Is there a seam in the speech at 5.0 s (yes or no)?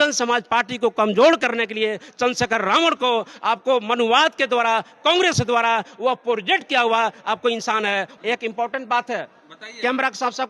no